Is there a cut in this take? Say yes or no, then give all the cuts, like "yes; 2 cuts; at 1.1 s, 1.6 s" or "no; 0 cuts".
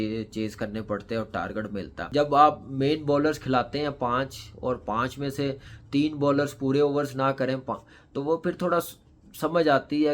yes; 1 cut; at 2.1 s